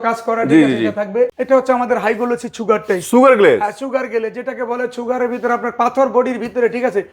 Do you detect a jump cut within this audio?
yes; 1 cut; at 1.4 s

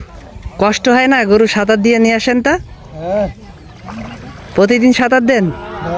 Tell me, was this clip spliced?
no; 0 cuts

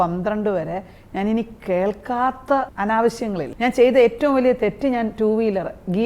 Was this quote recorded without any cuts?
no; 2 cuts; at 2.7 s, 3.5 s

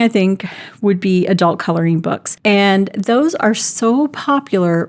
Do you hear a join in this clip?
yes; 1 cut; at 2.2 s

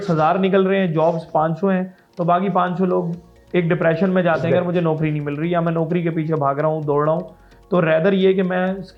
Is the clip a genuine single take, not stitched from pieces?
yes; 0 cuts

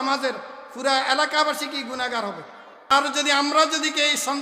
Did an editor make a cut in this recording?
yes; 1 cut; at 3.0 s

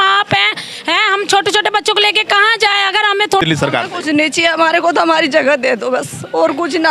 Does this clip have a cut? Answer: yes; 1 cut; at 3.4 s

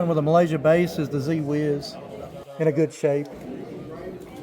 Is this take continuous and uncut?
yes; 0 cuts

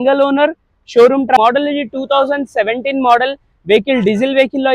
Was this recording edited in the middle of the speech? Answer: yes; 1 cut; at 1.4 s

